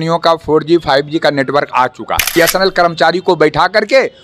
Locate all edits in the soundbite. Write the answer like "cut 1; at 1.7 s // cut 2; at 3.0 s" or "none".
cut 1; at 2.3 s